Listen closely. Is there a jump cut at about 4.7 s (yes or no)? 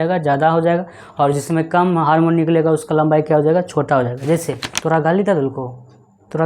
yes